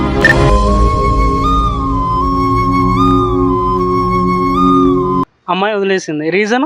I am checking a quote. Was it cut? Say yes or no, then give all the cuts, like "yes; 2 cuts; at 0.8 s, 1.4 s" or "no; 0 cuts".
yes; 1 cut; at 5.4 s